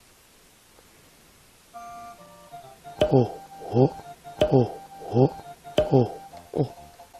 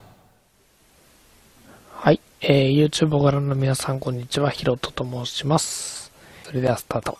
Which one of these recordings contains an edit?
second; 1 cut; at 4.6 s

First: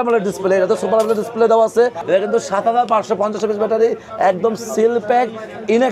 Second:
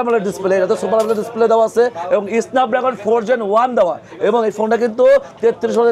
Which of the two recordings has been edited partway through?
first; 1 cut; at 2.0 s

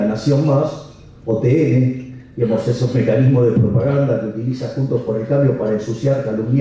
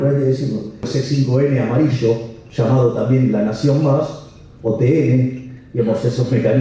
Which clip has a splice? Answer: second; 2 cuts; at 0.9 s, 2.4 s

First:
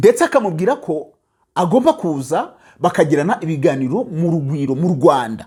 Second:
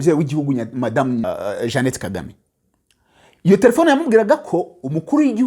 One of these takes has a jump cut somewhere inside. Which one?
second; 1 cut; at 1.2 s

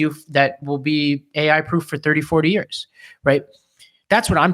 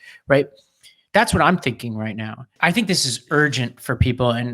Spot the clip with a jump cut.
second; 1 cut; at 2.5 s

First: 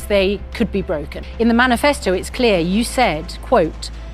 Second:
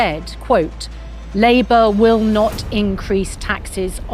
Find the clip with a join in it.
first; 1 cut; at 1.2 s

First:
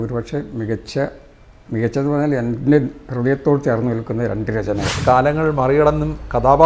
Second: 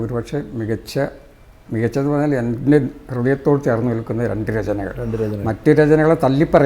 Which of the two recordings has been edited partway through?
first; 1 cut; at 5.0 s

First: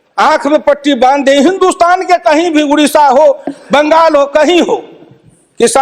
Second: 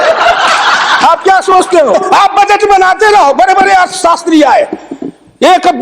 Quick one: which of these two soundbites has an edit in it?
second; 1 cut; at 1.9 s

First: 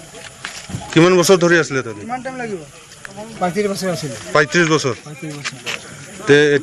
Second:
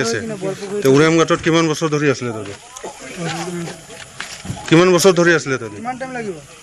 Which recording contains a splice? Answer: second; 1 cut; at 2.3 s

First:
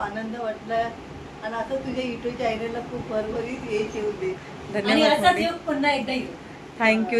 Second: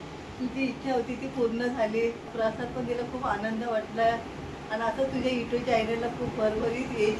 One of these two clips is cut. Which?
second; 1 cut; at 2.3 s

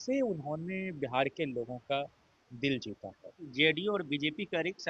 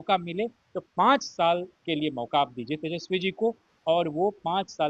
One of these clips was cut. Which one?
first; 1 cut; at 3.5 s

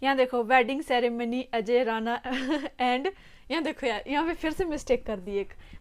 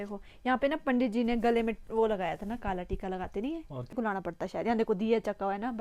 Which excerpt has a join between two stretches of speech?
second; 1 cut; at 3.9 s

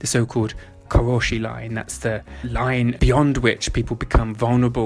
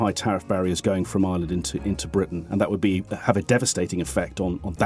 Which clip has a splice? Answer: first; 2 cuts; at 0.8 s, 2.8 s

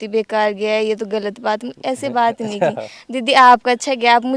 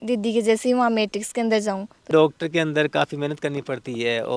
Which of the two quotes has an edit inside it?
second; 1 cut; at 2.1 s

